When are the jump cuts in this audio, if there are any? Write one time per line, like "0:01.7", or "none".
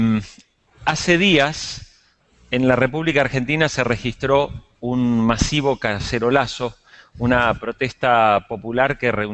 none